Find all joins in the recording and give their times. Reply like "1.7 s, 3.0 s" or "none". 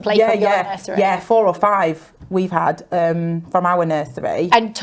none